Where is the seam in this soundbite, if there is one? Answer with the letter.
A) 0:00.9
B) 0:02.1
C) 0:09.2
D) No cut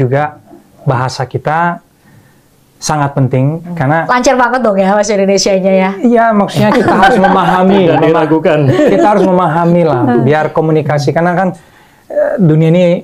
D